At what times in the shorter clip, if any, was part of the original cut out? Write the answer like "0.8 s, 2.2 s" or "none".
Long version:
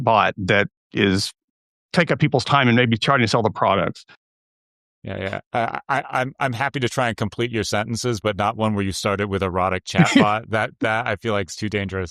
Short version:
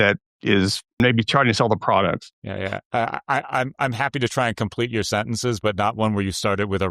1.0 s, 2.4 s